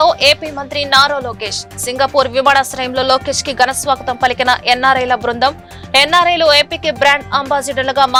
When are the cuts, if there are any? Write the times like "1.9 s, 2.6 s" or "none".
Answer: none